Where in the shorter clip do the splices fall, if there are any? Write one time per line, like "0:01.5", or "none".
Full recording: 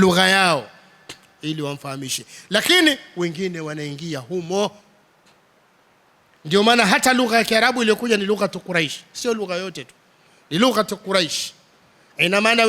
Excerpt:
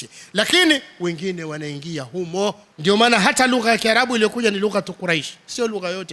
0:02.7